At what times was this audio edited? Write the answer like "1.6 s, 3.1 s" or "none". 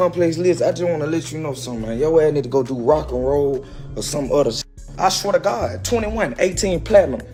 none